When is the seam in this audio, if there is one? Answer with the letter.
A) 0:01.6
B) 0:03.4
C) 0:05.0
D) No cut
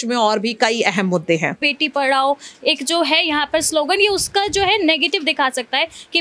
A